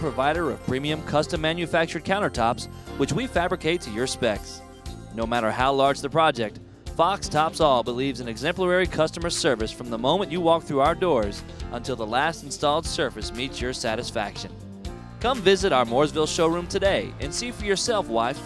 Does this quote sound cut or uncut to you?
uncut